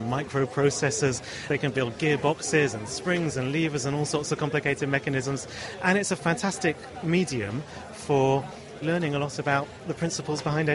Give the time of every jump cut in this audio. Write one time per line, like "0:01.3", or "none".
0:01.4
0:08.8